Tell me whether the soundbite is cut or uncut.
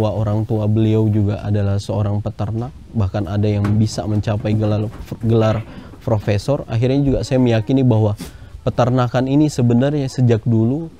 uncut